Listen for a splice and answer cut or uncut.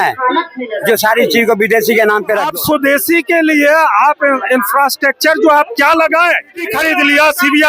cut